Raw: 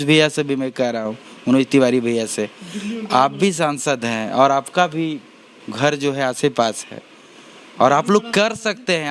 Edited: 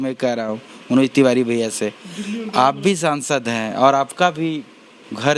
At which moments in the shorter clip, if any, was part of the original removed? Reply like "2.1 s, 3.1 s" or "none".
none